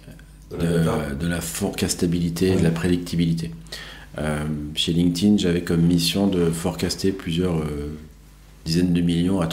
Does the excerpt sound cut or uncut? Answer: uncut